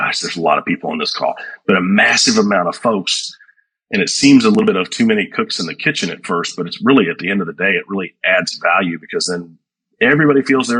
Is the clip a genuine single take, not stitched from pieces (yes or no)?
yes